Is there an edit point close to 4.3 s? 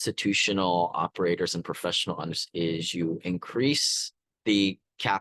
no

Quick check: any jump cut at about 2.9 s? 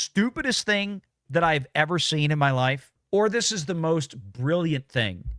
yes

